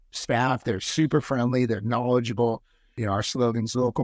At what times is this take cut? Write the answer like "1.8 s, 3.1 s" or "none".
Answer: 3.0 s

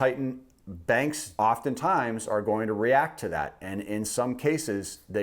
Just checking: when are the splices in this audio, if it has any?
1.2 s

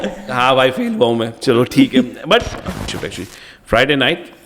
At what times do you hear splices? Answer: 3.0 s

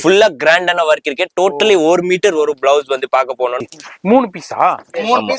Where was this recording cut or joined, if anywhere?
3.6 s

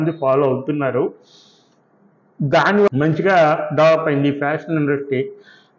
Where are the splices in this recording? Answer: 2.9 s

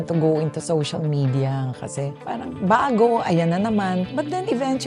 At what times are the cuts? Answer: 2.2 s, 4.1 s

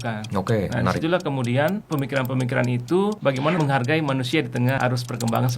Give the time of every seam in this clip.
1.8 s, 3.3 s, 4.8 s

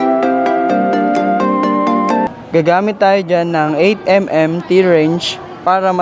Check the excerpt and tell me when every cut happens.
2.3 s

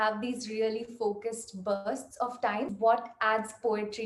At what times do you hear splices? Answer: 2.7 s

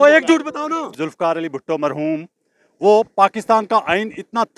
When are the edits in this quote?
0.9 s

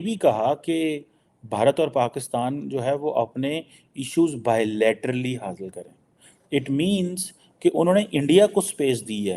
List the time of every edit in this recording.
none

